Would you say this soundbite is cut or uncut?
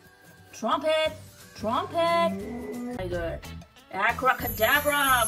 cut